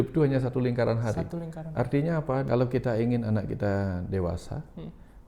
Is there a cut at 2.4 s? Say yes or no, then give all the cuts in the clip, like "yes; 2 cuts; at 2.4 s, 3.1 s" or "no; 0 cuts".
yes; 1 cut; at 2.4 s